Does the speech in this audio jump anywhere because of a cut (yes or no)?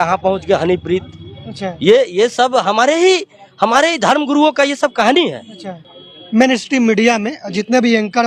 no